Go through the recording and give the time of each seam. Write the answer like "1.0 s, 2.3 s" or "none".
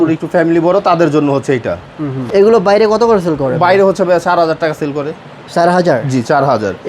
2.2 s

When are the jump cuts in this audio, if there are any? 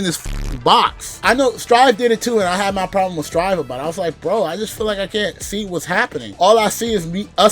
1.1 s, 6.2 s

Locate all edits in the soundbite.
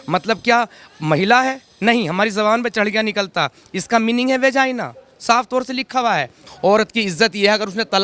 6.4 s

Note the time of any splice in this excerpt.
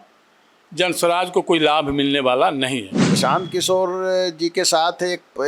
3.1 s

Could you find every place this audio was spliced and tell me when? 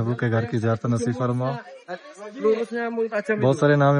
none

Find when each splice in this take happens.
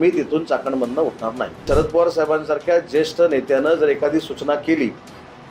1.6 s

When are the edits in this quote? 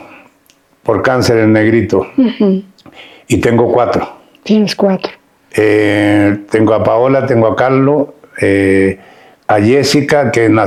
none

